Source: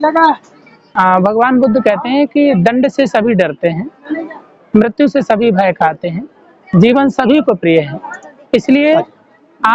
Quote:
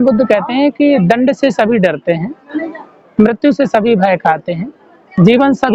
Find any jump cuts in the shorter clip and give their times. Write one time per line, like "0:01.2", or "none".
none